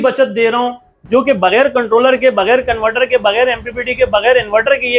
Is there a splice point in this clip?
yes; 1 cut; at 0.9 s

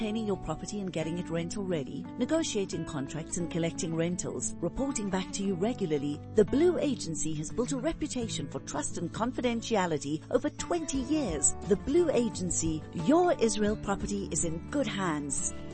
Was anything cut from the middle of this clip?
no; 0 cuts

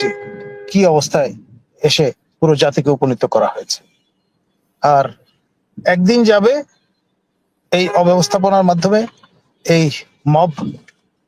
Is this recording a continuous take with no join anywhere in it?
yes; 0 cuts

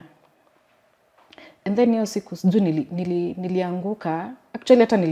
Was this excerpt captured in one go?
yes; 0 cuts

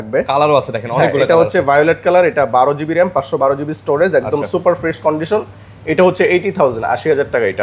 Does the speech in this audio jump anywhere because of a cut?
no; 0 cuts

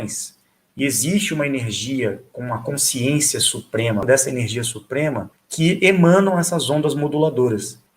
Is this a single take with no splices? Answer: no; 2 cuts; at 4.0 s, 5.2 s

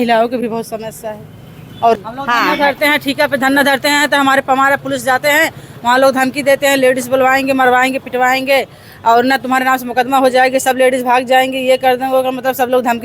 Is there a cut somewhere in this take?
yes; 1 cut; at 2.0 s

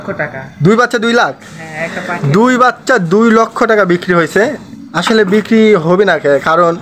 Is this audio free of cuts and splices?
yes; 0 cuts

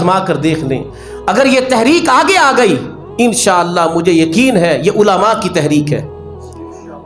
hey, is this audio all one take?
yes; 0 cuts

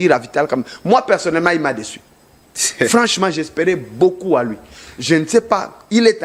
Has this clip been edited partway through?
no; 0 cuts

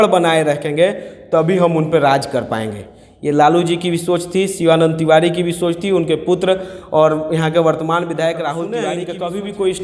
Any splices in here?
yes; 1 cut; at 8.9 s

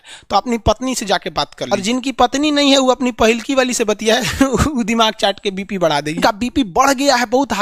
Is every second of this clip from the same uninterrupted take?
no; 2 cuts; at 1.7 s, 6.2 s

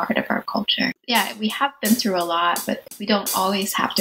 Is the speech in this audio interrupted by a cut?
yes; 1 cut; at 1.0 s

